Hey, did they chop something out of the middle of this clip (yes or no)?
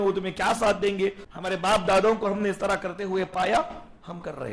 yes